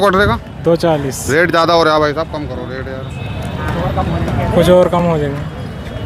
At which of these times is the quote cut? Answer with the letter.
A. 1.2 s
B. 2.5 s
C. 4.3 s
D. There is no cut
A